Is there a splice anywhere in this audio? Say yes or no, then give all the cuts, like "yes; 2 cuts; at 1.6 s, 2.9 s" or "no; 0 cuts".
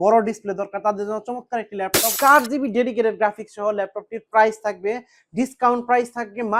yes; 1 cut; at 2.1 s